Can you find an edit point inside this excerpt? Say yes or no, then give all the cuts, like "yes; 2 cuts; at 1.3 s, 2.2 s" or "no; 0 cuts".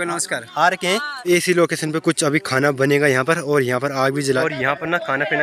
yes; 2 cuts; at 1.1 s, 4.4 s